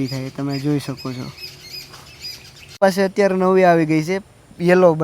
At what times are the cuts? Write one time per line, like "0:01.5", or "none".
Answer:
0:02.8